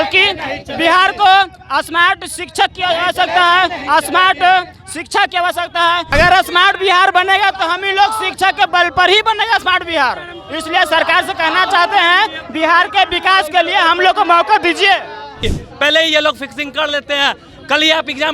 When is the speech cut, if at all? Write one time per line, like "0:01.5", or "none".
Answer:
0:06.0
0:15.5